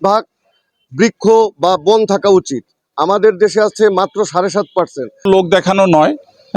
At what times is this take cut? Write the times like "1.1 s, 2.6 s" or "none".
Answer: 5.3 s